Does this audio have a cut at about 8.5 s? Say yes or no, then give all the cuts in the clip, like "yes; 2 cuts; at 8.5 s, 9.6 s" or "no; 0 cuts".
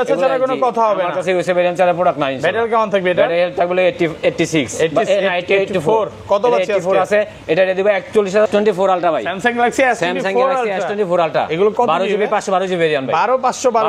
yes; 1 cut; at 8.5 s